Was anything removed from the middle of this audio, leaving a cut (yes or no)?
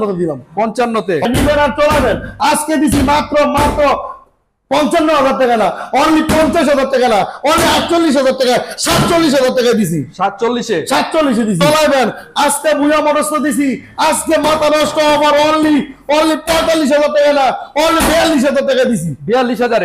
yes